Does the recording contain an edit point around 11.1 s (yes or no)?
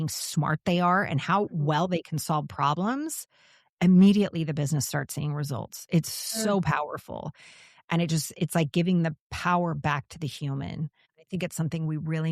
yes